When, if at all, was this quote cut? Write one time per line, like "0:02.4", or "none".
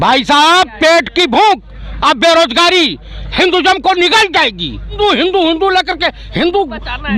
0:05.0

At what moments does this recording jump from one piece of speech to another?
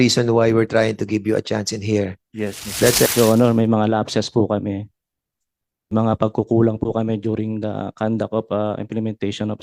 0:03.1
0:05.9

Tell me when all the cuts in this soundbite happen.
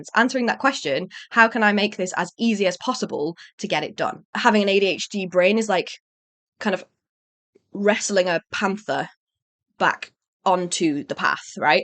0:04.2

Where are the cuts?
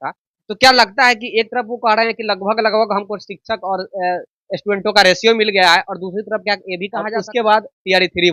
0:07.0

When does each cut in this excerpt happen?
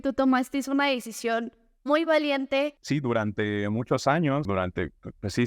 0:02.8
0:04.5

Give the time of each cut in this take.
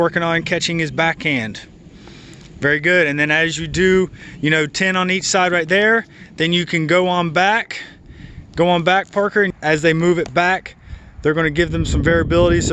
none

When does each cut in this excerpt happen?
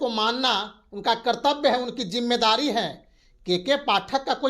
none

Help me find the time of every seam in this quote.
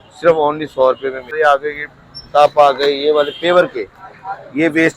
0:01.3

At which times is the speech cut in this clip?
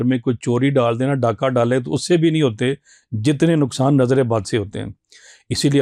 none

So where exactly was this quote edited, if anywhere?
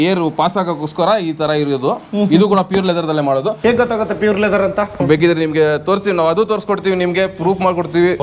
0:03.5
0:05.0

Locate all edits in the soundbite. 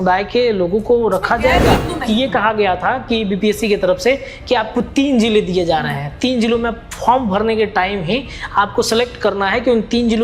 0:01.9

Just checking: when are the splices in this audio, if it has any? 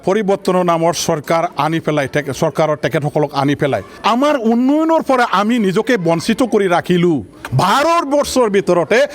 0:03.9
0:07.4

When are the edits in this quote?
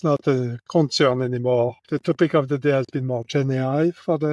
0:01.8

